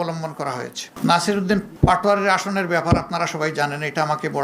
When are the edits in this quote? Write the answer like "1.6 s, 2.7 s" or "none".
0.9 s, 1.7 s